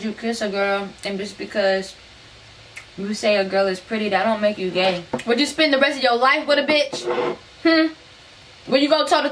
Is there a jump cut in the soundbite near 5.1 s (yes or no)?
yes